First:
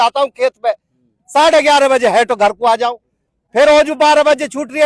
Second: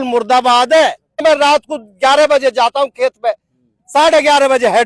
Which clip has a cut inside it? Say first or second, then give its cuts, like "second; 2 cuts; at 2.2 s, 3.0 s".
second; 1 cut; at 1.2 s